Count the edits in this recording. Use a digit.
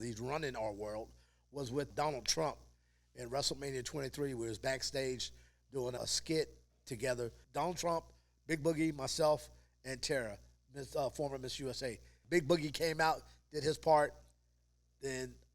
4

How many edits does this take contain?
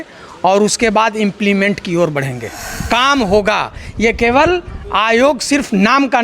1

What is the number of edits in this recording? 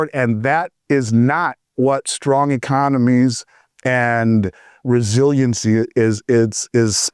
0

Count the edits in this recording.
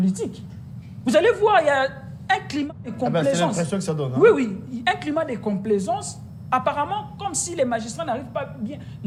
0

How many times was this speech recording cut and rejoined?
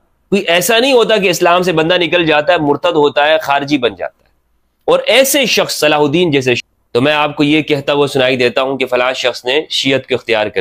1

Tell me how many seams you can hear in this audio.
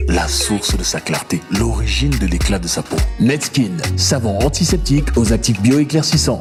0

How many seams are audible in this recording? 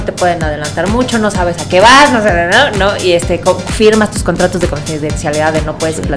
0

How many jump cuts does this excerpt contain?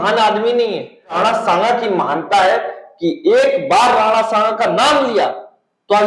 1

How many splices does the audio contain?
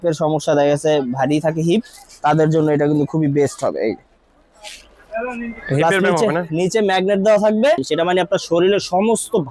1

